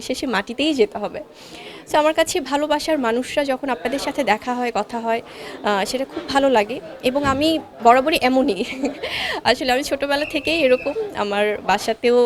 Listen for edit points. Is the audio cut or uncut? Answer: uncut